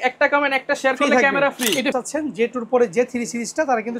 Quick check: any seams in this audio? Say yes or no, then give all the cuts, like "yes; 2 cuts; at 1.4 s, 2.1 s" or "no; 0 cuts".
yes; 1 cut; at 1.9 s